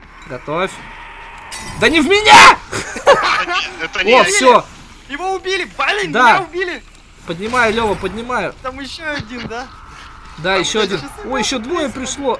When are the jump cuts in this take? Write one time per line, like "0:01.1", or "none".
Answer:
none